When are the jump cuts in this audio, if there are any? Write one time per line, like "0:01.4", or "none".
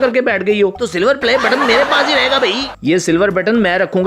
0:00.8
0:02.7